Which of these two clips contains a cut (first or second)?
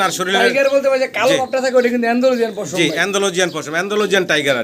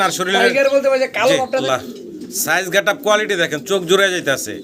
second